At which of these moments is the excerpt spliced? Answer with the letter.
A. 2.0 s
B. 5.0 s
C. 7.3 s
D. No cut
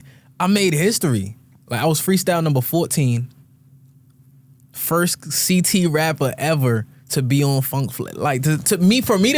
D